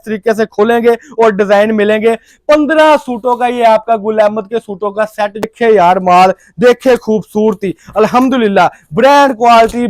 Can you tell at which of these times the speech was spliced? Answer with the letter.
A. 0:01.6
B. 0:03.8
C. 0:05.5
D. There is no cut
C